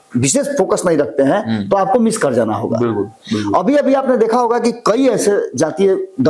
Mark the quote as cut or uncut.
uncut